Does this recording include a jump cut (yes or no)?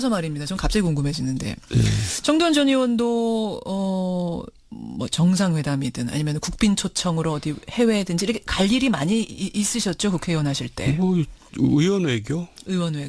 no